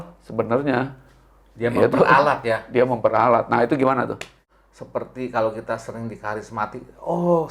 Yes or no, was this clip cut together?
yes